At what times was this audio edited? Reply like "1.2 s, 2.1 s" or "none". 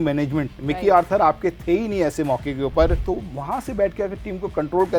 3.0 s